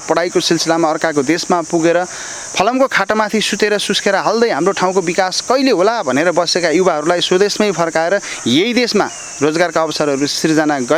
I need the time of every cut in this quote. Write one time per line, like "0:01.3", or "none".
none